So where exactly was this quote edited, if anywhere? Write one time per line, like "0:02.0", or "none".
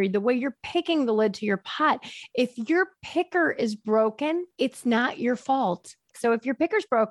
0:04.5
0:06.1